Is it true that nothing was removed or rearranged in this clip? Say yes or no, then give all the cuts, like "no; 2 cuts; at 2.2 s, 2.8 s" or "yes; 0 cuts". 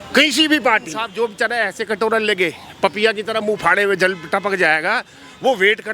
no; 1 cut; at 1.0 s